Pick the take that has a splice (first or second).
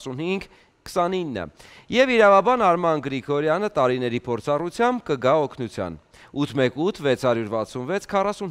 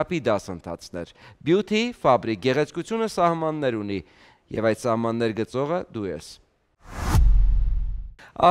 second